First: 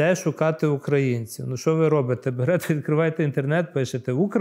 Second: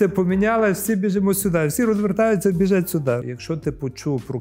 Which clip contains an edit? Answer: second; 1 cut; at 3.3 s

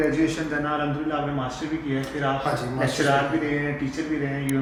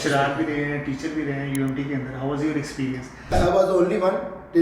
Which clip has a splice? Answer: second; 1 cut; at 3.3 s

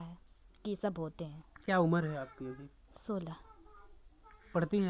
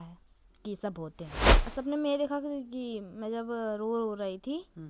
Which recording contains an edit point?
second; 1 cut; at 1.7 s

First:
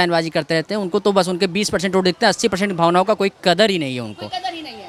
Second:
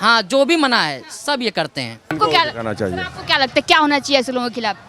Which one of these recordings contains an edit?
second; 1 cut; at 2.1 s

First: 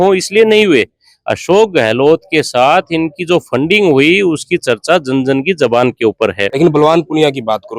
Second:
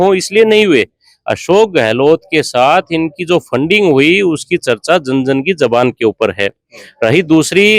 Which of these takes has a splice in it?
first; 1 cut; at 6.5 s

